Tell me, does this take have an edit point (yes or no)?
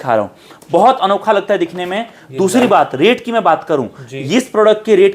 no